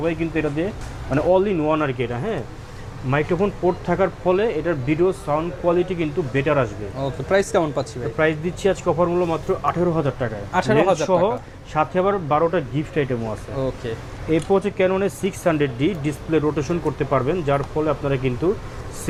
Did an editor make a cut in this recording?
no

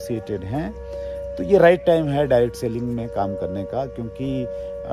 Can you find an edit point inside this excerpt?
no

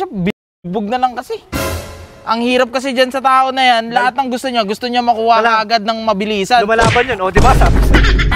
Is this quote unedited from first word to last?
yes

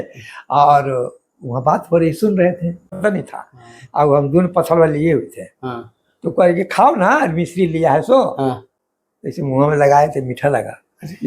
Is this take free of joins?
no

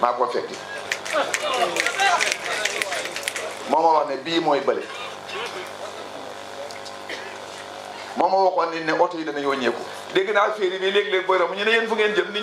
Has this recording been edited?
no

